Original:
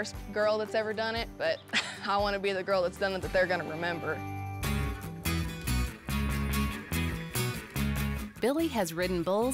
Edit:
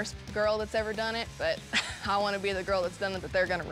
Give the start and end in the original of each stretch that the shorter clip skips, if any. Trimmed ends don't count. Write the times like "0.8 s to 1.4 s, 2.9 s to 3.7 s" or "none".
none